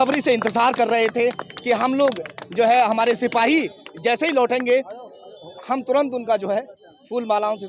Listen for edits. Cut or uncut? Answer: uncut